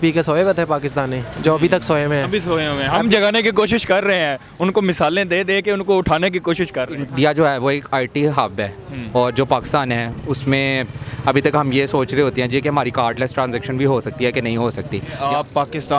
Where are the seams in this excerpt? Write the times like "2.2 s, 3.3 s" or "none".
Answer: 7.1 s, 15.1 s